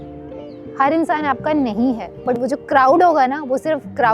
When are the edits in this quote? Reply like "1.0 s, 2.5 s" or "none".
2.1 s